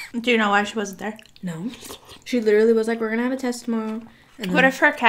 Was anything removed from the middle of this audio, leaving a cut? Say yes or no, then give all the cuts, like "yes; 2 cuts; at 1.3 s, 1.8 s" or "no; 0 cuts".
no; 0 cuts